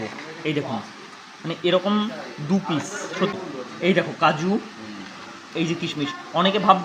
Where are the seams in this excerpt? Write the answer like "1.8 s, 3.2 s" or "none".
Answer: 3.3 s